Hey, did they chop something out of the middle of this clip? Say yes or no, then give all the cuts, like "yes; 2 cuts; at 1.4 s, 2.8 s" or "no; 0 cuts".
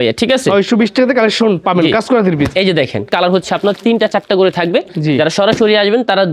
yes; 1 cut; at 3.1 s